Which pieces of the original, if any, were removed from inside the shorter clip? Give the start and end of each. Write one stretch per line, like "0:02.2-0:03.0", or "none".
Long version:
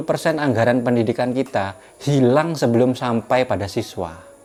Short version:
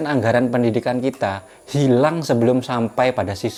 none